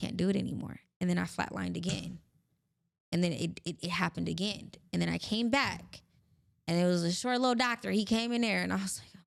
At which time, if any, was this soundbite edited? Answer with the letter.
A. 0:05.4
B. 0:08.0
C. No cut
C